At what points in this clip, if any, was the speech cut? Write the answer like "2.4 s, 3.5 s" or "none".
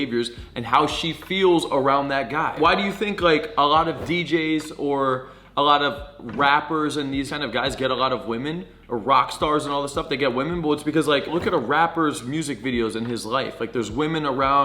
2.6 s, 7.3 s, 11.3 s

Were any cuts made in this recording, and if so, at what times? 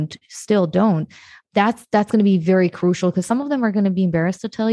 1.3 s

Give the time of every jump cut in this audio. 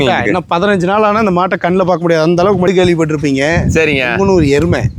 2.7 s

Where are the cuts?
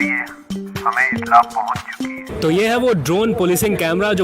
2.3 s

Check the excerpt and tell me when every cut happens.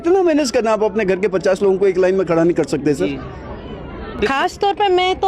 4.3 s

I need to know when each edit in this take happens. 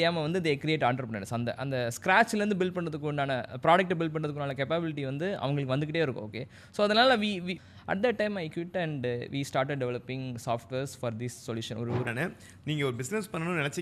7.5 s, 12.1 s

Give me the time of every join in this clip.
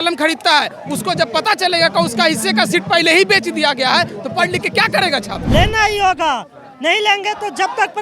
5.4 s

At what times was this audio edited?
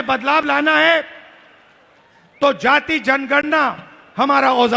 none

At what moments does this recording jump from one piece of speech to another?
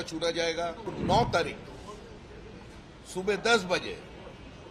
0.9 s

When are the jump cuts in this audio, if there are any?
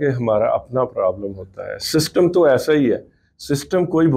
none

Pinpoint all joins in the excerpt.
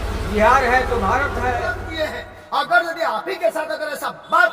1.8 s

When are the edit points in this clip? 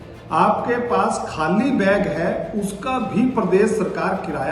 none

